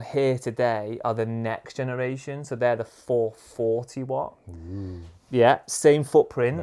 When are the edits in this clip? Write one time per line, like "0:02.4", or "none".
none